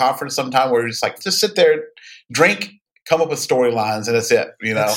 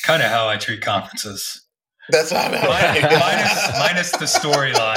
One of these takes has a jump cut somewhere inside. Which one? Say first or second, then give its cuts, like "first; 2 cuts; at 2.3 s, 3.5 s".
first; 1 cut; at 1.2 s